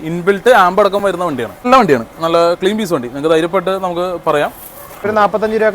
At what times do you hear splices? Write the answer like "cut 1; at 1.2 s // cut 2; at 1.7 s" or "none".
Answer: cut 1; at 1.6 s // cut 2; at 5.1 s